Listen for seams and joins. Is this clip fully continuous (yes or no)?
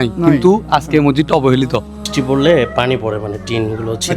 no